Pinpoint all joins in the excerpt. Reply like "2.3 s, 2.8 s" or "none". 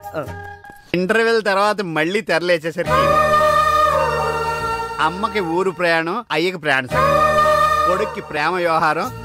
0.9 s